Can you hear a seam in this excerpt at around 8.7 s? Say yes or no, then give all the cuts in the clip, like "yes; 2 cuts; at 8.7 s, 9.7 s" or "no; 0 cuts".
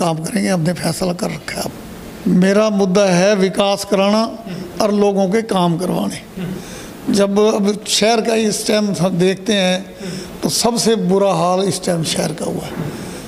no; 1 cut; at 1.8 s